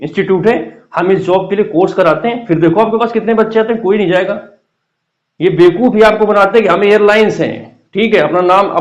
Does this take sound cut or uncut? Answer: uncut